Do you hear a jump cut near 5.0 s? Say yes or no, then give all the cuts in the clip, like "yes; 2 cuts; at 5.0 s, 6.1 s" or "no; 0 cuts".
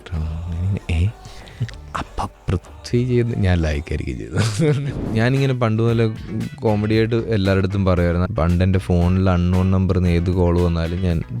yes; 2 cuts; at 5.0 s, 8.2 s